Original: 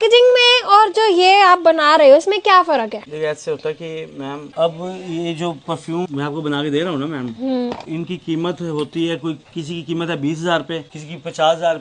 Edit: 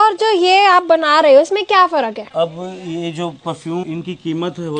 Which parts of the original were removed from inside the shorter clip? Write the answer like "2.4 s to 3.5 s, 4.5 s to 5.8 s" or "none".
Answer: 3.0 s to 4.5 s, 6.1 s to 7.9 s